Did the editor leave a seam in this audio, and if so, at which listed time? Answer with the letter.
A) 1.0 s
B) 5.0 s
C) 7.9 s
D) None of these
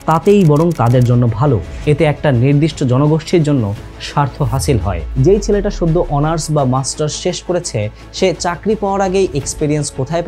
B